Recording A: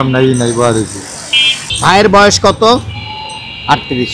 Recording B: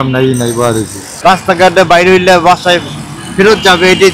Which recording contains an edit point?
B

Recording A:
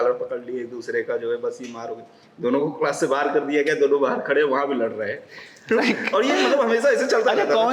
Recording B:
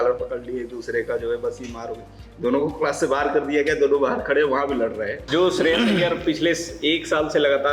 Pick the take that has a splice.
B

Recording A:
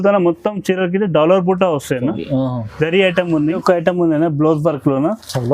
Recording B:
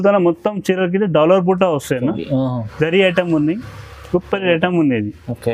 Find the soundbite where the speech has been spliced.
A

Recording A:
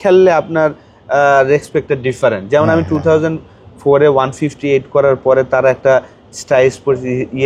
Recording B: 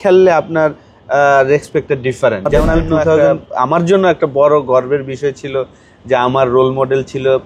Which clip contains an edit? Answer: B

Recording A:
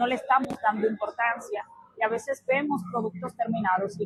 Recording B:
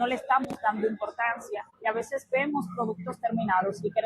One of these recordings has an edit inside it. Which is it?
B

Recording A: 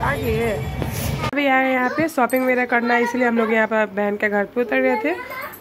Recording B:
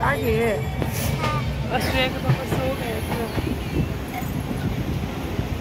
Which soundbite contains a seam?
A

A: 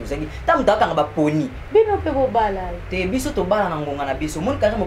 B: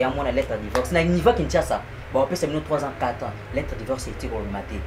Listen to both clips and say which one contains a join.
A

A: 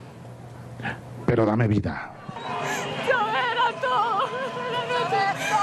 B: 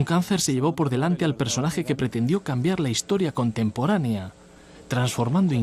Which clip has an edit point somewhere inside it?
B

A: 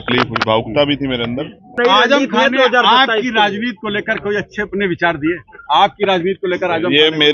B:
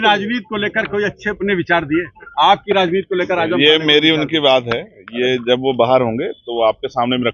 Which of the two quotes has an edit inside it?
A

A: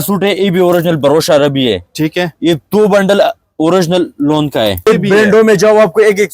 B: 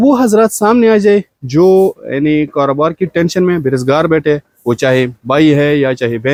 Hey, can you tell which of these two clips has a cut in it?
A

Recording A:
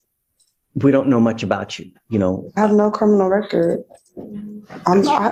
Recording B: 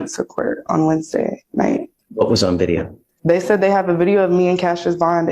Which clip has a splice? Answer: B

